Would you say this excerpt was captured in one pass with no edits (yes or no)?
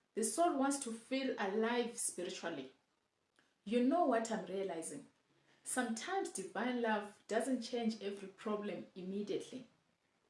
yes